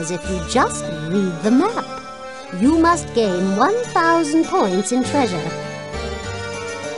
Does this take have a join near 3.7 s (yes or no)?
no